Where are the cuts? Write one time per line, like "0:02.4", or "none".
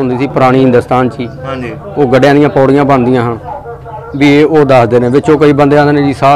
none